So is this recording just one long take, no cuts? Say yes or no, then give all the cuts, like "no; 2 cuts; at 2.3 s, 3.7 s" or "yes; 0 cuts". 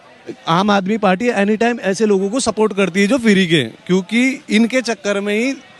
yes; 0 cuts